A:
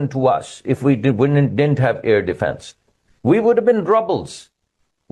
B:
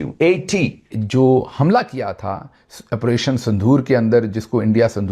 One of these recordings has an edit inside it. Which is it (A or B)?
B